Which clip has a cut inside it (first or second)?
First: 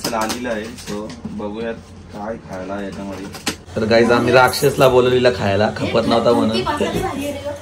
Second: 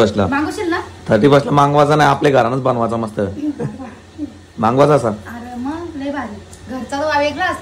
first